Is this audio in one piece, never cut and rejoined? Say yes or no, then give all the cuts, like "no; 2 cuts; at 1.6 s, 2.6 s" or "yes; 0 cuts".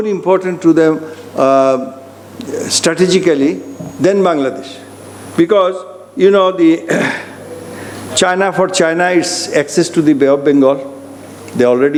yes; 0 cuts